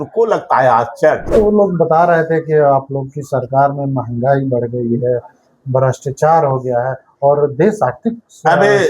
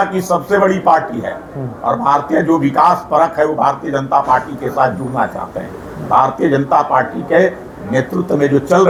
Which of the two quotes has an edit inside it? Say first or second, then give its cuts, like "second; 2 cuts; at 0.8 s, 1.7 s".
first; 1 cut; at 1.2 s